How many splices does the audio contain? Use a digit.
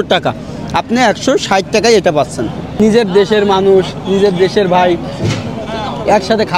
1